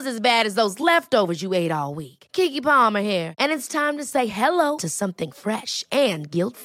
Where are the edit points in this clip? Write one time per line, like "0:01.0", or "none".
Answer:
none